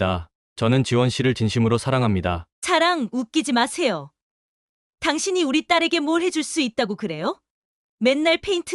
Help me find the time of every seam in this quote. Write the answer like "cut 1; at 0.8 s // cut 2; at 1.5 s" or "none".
cut 1; at 2.5 s